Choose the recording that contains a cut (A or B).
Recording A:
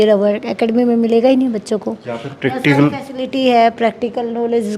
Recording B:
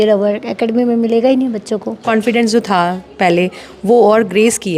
B